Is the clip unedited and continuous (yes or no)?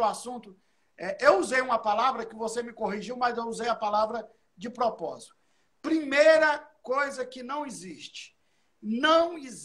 yes